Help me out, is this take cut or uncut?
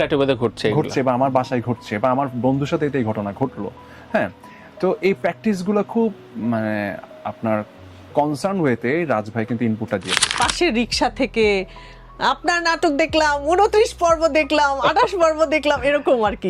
cut